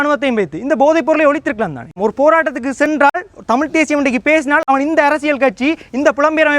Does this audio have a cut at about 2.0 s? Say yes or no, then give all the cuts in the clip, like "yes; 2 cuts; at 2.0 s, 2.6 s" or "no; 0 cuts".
yes; 1 cut; at 2.0 s